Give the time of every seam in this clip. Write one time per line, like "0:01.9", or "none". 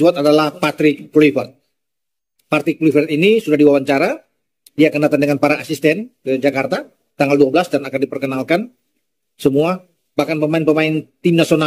none